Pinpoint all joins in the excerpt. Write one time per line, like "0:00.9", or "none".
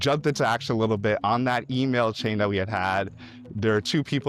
none